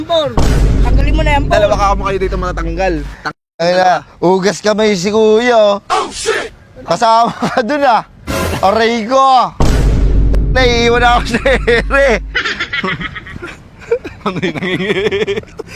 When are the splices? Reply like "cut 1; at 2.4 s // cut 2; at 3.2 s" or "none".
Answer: none